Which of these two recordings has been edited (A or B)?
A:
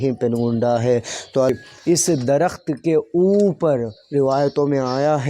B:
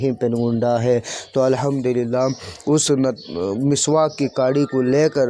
A